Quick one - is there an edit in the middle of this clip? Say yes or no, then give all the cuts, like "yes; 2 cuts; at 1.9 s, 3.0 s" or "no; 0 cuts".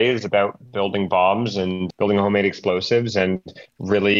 yes; 1 cut; at 1.8 s